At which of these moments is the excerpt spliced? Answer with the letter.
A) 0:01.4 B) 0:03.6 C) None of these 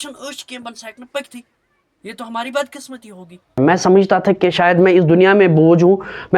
B